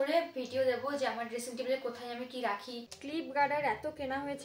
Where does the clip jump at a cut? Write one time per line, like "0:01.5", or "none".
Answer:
0:03.2